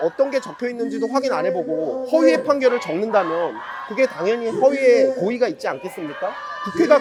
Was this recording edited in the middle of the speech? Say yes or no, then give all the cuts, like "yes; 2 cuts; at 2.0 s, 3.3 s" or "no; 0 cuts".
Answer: no; 0 cuts